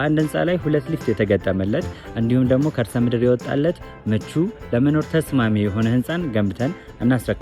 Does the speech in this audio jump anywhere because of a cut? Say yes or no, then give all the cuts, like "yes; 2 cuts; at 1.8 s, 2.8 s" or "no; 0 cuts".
no; 0 cuts